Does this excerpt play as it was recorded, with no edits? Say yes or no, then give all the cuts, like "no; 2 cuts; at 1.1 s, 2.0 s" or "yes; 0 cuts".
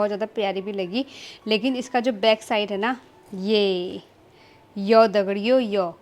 yes; 0 cuts